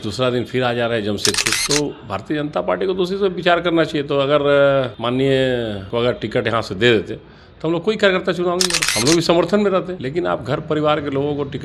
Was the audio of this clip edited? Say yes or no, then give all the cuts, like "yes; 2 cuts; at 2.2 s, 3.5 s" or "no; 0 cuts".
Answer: no; 0 cuts